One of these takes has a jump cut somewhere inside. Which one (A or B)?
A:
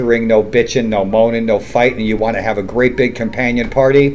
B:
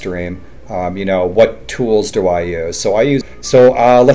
B